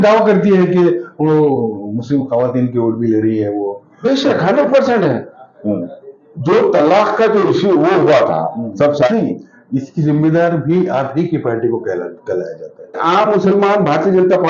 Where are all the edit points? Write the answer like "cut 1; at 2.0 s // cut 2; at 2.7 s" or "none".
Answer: cut 1; at 9.1 s // cut 2; at 13.0 s